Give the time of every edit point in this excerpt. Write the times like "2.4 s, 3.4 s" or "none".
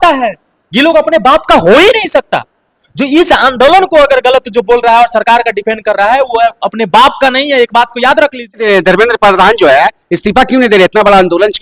8.6 s